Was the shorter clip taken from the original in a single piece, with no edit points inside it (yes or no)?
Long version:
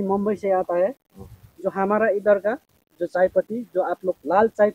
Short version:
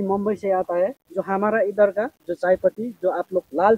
no